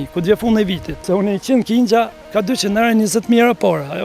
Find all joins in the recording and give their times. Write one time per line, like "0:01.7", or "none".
0:01.0